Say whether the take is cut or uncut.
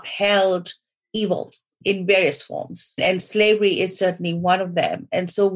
cut